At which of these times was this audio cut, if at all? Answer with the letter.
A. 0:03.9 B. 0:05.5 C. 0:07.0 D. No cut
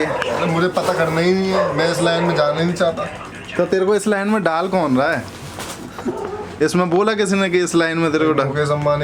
D